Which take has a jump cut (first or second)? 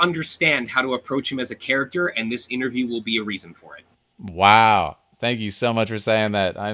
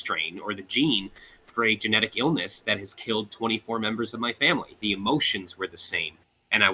second